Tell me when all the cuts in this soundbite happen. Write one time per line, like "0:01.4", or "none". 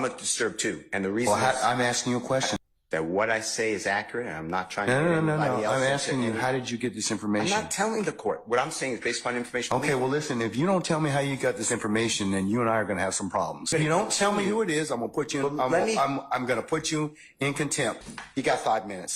0:02.5
0:13.7
0:18.1

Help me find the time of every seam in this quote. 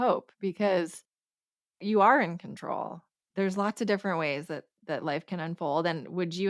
none

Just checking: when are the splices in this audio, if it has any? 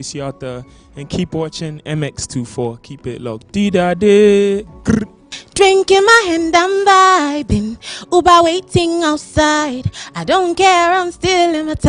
none

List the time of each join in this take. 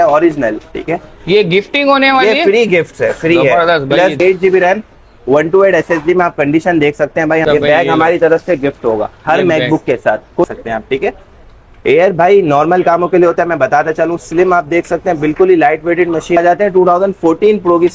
0:04.2
0:07.4
0:10.4
0:16.4

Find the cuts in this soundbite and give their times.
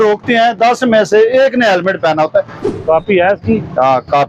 0:02.6

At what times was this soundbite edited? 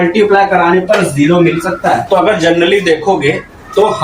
0:02.0

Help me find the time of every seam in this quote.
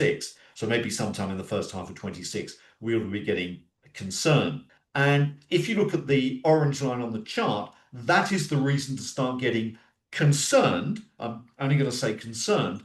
0:04.6

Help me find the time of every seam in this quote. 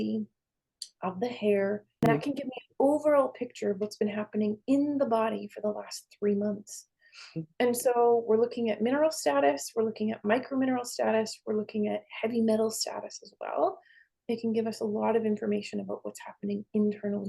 0:02.1

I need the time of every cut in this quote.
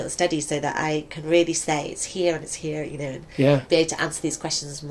0:03.6

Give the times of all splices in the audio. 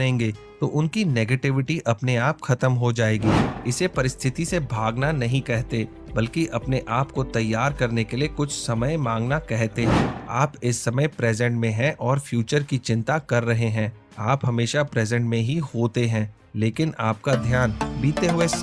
0:03.5
0:09.9

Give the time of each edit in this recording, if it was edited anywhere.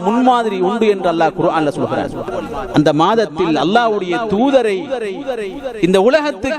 0:02.3

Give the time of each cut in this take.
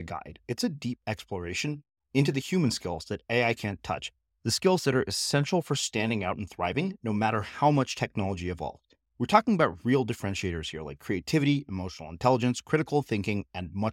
none

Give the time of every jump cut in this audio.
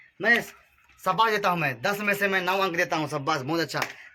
none

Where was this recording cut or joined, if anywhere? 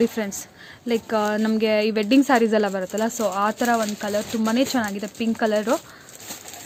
none

